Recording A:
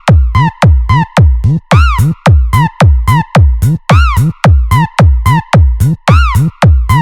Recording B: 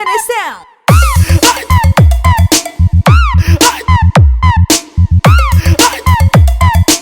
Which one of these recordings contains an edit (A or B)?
B